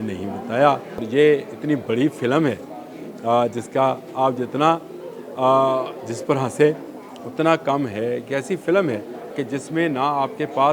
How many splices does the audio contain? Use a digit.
2